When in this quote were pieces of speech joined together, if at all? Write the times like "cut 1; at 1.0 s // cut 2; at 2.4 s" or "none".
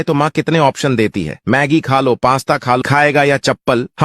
cut 1; at 2.8 s